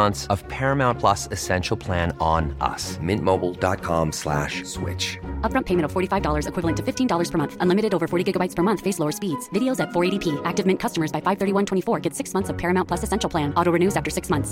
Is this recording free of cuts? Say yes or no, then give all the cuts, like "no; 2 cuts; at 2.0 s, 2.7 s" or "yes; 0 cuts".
yes; 0 cuts